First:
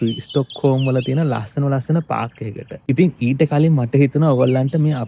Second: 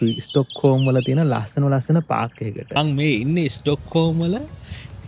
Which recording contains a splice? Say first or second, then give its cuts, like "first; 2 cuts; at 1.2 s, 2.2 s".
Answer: second; 1 cut; at 2.8 s